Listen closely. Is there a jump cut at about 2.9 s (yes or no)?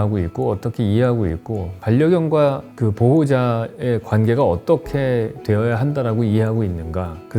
no